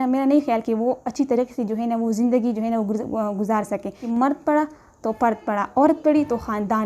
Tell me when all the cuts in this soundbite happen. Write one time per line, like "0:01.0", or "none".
0:04.1